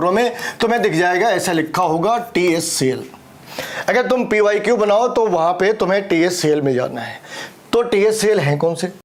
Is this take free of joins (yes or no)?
yes